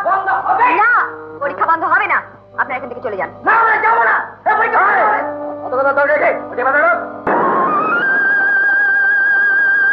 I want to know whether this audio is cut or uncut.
cut